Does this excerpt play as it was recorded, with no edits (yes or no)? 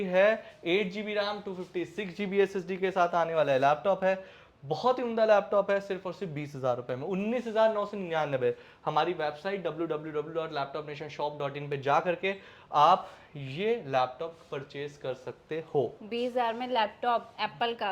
yes